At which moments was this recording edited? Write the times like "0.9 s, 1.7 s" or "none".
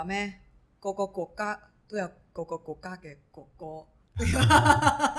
none